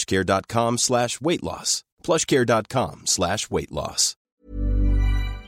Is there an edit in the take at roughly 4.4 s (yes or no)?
yes